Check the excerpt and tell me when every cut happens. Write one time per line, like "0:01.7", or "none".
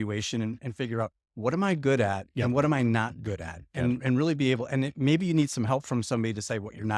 none